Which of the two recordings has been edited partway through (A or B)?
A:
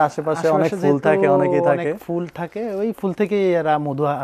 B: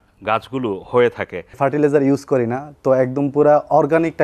B